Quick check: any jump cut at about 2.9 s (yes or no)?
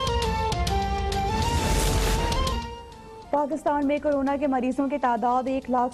no